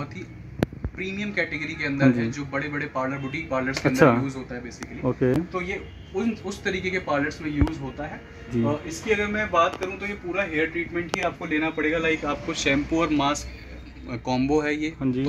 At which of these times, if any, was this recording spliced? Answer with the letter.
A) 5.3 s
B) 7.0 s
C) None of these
C